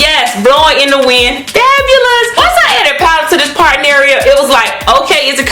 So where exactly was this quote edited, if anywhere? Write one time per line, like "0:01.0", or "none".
0:02.4